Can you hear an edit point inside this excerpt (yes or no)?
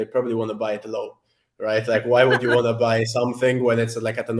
no